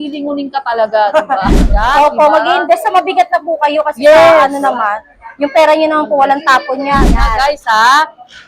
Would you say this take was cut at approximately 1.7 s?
yes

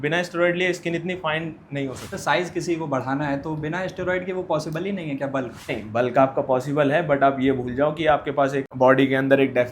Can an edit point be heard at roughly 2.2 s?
yes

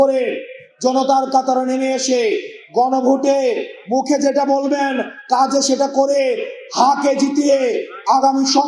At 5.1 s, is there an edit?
no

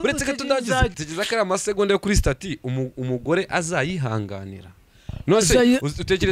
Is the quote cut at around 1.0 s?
yes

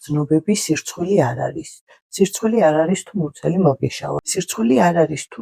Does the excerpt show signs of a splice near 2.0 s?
no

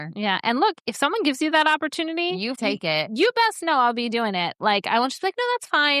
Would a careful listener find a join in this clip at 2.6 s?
yes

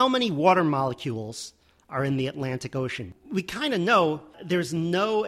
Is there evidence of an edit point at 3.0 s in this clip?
yes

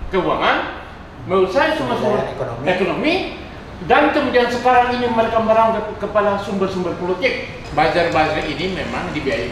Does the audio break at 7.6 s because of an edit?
yes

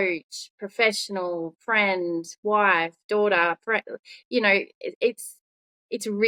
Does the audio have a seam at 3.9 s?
no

